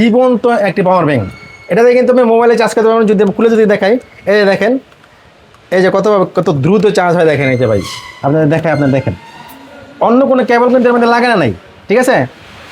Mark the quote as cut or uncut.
uncut